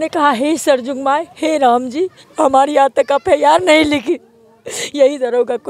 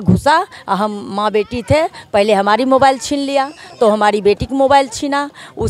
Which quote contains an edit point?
first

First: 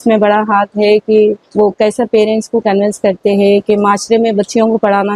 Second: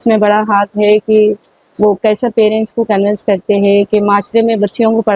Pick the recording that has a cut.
first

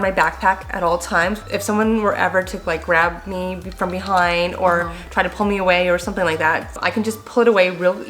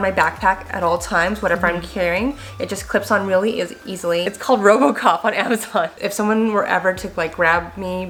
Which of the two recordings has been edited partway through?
first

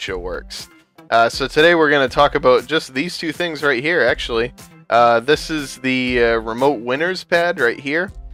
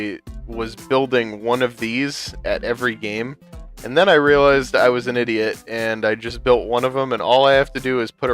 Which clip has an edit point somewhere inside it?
second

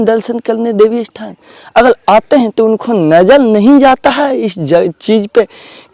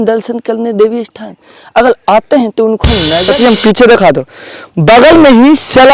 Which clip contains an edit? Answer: second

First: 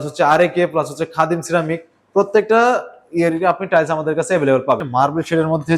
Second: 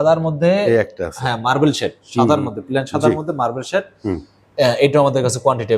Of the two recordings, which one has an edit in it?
first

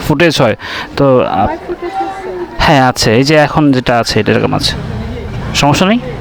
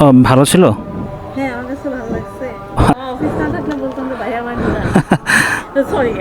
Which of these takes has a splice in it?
second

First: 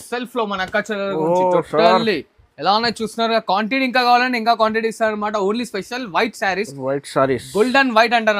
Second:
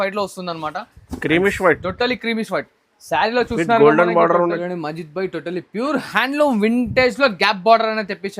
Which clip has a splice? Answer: second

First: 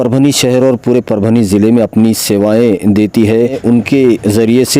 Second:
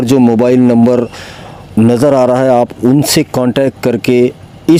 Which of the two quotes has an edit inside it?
first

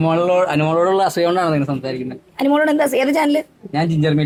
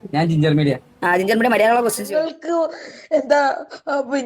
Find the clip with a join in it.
second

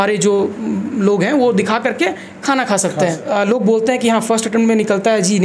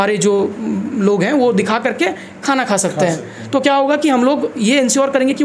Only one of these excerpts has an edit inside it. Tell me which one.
first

